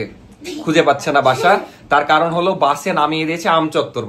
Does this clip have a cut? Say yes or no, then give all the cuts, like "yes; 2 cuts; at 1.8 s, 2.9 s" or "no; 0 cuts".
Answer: no; 0 cuts